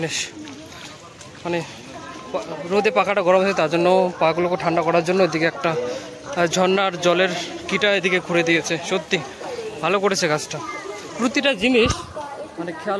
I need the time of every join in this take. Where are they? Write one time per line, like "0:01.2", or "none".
none